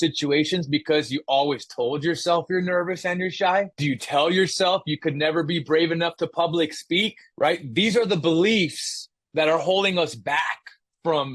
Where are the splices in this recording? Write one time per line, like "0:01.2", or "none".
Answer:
0:07.2